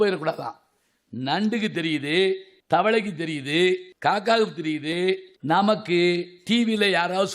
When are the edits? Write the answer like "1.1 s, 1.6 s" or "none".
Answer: 2.5 s, 3.9 s, 5.3 s